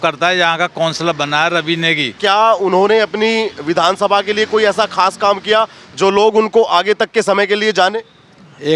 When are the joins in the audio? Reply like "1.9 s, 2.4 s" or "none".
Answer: 2.2 s

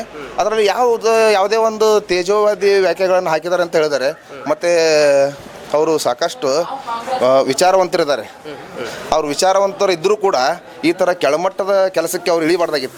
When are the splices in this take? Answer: none

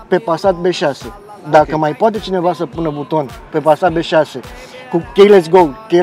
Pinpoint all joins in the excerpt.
none

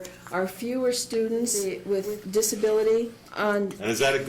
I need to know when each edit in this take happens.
1.7 s, 3.2 s

